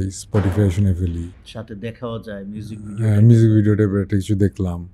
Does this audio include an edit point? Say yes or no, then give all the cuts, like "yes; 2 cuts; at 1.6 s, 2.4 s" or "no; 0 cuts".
no; 0 cuts